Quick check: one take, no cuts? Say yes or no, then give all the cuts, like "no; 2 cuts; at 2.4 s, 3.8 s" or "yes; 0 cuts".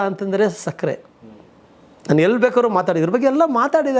yes; 0 cuts